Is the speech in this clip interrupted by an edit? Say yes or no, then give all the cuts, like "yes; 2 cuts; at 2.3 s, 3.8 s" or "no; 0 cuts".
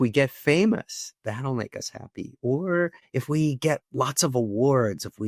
yes; 1 cut; at 3.1 s